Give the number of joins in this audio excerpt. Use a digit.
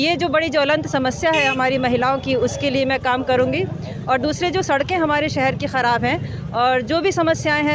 0